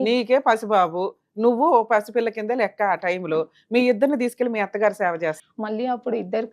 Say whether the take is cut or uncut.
cut